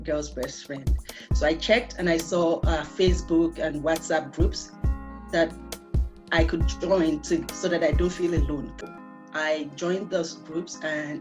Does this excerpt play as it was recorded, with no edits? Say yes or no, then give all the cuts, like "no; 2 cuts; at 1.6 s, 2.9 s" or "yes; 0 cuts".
no; 1 cut; at 8.8 s